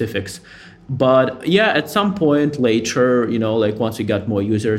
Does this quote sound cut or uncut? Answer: uncut